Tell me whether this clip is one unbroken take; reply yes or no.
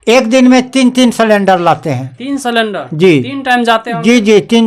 yes